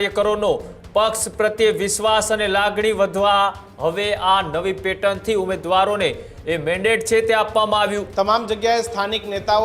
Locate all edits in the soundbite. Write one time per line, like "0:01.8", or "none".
0:08.0